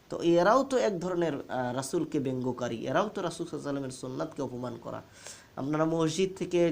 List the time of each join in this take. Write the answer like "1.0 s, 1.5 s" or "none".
none

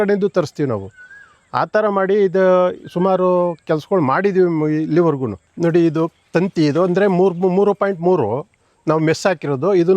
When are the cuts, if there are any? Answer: none

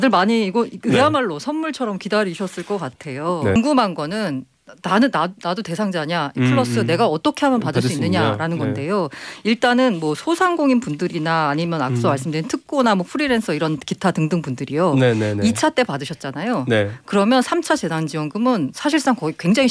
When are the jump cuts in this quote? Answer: 3.6 s

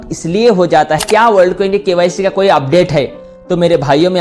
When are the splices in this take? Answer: 1.0 s

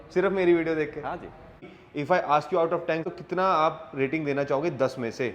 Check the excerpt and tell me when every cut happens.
1.8 s, 3.1 s

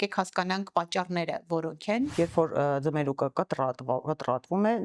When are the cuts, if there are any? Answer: 2.1 s

